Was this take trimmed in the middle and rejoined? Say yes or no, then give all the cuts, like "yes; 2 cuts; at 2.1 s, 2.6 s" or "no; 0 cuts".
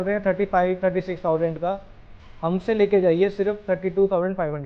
no; 0 cuts